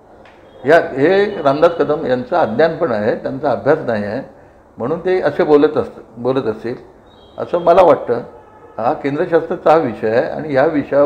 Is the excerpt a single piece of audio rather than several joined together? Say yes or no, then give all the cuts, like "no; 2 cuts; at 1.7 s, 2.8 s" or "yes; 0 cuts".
yes; 0 cuts